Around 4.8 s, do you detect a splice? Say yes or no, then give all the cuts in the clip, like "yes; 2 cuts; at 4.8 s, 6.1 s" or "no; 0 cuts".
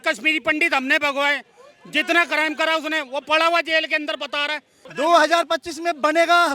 yes; 1 cut; at 4.8 s